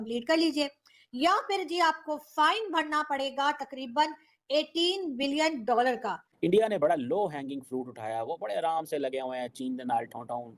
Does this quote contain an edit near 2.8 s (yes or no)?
no